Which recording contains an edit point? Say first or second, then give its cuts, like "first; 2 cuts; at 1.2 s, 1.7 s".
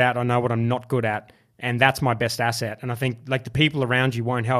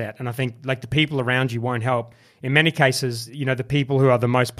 second; 1 cut; at 3.3 s